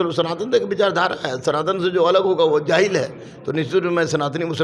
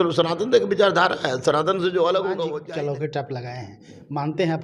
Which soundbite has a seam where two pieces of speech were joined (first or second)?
second